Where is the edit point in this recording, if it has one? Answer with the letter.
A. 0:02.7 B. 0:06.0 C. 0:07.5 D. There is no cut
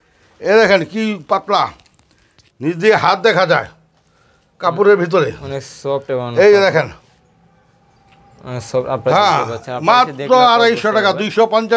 D